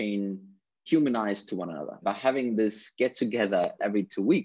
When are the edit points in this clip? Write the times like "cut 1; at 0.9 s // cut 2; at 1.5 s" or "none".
cut 1; at 0.8 s // cut 2; at 2.0 s // cut 3; at 3.6 s